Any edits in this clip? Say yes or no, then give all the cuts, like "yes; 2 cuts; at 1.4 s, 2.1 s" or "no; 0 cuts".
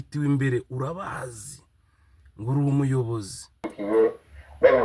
yes; 1 cut; at 3.7 s